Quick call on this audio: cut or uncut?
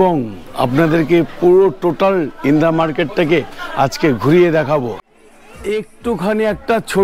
cut